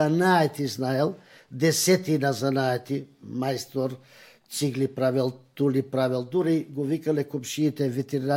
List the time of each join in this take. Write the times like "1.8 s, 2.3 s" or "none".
none